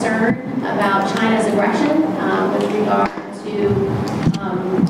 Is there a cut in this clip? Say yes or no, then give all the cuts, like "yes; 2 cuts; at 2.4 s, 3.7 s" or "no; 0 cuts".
no; 0 cuts